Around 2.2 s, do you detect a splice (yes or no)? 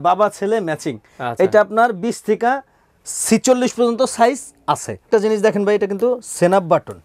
no